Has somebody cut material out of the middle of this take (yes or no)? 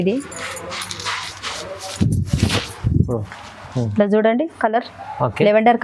no